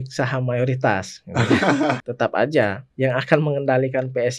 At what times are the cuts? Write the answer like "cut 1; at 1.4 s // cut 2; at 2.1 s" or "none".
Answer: cut 1; at 2.1 s // cut 2; at 2.8 s